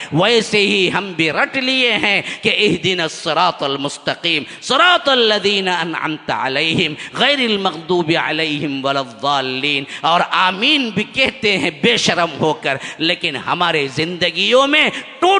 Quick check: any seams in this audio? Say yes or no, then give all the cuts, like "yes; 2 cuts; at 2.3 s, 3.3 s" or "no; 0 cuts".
no; 0 cuts